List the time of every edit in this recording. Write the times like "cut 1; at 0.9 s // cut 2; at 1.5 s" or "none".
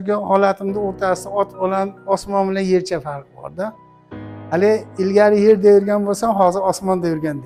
none